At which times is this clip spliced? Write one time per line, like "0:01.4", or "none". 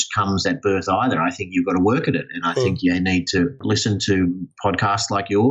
0:03.6